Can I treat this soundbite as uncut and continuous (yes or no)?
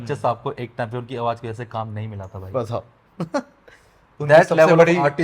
yes